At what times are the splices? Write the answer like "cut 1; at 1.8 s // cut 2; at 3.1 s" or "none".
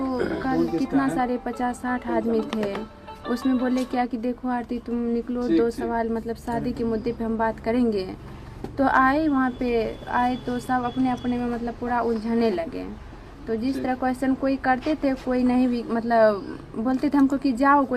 none